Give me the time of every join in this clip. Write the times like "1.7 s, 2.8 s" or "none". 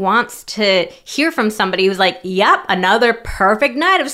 none